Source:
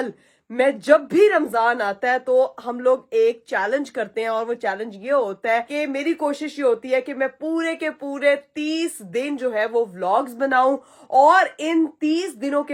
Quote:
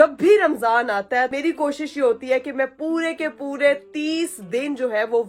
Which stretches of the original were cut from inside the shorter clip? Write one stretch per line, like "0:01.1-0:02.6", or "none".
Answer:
0:02.2-0:05.9